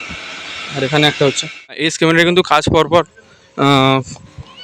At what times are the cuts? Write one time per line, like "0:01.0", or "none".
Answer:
0:01.9